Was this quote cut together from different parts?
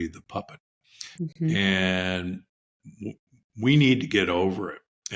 no; 0 cuts

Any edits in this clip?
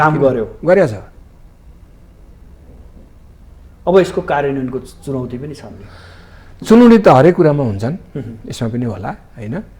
no; 0 cuts

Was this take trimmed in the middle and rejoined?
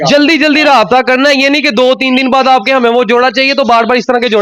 no; 0 cuts

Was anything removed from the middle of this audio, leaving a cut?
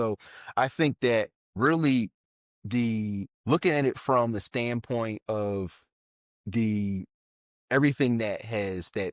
yes; 2 cuts; at 1.4 s, 3.3 s

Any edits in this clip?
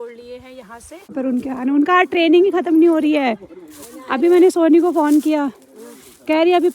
yes; 1 cut; at 1.1 s

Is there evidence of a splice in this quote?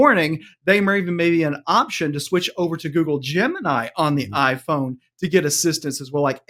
no; 0 cuts

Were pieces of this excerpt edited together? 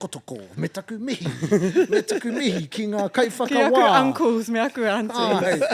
no; 0 cuts

